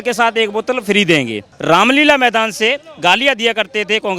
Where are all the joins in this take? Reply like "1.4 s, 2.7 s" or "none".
1.5 s